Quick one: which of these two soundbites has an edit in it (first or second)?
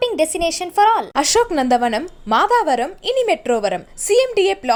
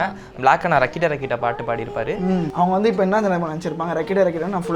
second